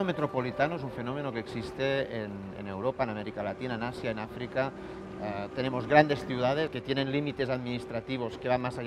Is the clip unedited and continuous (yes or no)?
no